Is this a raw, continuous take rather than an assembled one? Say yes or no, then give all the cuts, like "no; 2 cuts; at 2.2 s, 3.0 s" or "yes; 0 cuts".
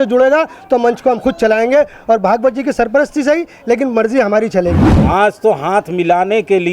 no; 1 cut; at 4.9 s